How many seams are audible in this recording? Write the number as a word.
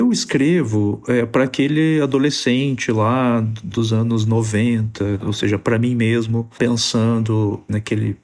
zero